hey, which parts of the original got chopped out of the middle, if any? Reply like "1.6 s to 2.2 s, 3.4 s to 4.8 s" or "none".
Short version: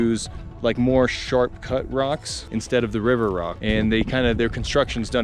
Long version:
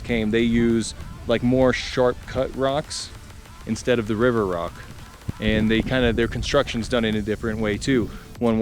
3.0 s to 3.5 s, 4.7 s to 5.3 s